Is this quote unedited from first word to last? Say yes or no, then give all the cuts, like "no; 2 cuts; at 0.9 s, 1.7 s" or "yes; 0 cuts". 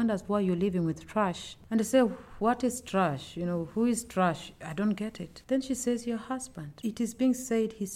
no; 1 cut; at 6.6 s